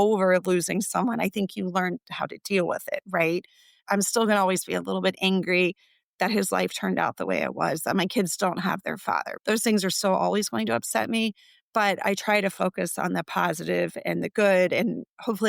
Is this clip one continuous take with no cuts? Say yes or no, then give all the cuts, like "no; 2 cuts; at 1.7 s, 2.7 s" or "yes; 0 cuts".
yes; 0 cuts